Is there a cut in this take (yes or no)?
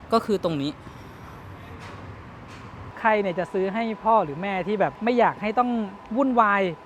yes